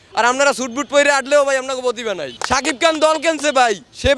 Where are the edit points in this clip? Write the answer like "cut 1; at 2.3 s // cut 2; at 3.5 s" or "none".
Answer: cut 1; at 2.3 s